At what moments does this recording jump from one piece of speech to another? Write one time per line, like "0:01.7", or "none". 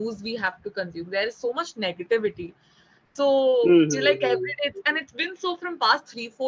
none